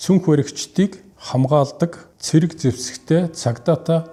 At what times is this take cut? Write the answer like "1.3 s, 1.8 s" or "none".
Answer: none